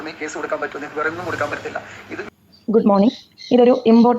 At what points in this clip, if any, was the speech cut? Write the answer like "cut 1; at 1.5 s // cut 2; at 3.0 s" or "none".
cut 1; at 2.2 s